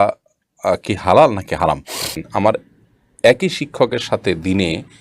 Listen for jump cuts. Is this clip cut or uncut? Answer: cut